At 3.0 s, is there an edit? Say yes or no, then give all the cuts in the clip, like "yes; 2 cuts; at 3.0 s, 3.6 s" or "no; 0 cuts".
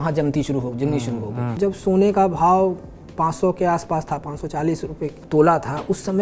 no; 2 cuts; at 1.5 s, 5.2 s